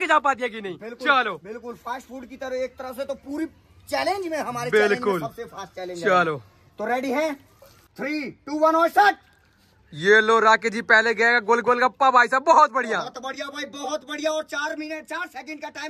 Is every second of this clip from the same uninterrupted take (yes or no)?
yes